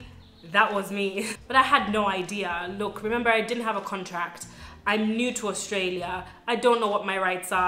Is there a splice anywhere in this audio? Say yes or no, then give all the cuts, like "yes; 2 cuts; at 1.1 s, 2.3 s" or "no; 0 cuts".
yes; 1 cut; at 1.3 s